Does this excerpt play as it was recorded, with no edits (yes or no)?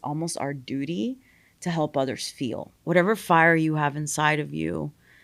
no